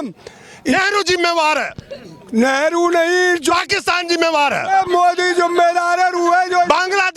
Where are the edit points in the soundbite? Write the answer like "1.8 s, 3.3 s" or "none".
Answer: none